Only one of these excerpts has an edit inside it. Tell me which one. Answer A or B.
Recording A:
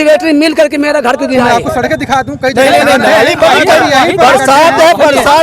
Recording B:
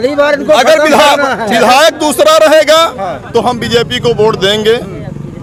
A